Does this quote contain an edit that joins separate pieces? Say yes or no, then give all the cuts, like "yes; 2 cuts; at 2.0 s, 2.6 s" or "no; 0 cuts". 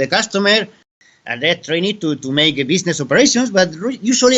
yes; 1 cut; at 0.9 s